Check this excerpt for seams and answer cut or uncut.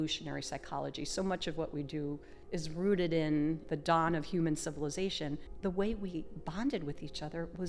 cut